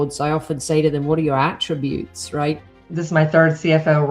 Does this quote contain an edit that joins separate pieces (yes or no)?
yes